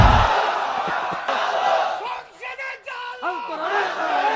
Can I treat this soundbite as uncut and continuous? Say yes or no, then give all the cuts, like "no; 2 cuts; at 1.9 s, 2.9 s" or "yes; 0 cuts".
no; 1 cut; at 1.3 s